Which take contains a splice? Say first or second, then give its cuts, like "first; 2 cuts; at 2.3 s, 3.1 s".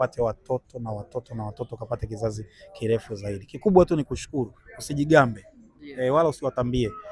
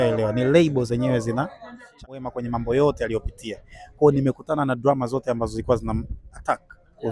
second; 1 cut; at 2.2 s